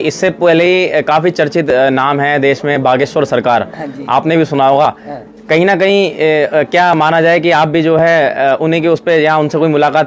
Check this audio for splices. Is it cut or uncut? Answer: uncut